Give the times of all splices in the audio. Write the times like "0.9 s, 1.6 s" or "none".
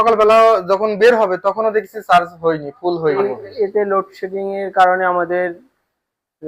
3.1 s